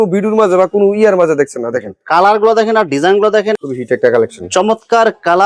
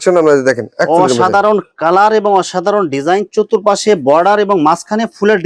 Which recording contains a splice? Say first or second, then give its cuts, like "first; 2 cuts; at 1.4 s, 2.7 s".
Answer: first; 1 cut; at 3.5 s